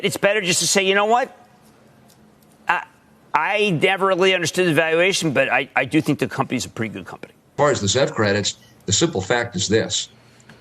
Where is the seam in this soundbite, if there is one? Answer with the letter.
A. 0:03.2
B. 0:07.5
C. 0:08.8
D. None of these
B